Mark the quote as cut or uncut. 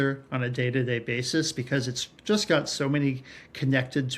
uncut